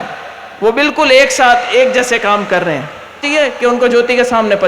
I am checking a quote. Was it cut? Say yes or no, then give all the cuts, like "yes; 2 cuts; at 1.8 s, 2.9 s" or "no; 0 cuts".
yes; 1 cut; at 3.2 s